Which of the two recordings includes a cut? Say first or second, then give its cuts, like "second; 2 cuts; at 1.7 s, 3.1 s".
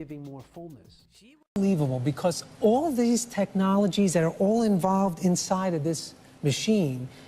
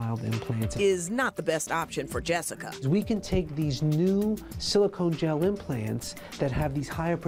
first; 1 cut; at 1.6 s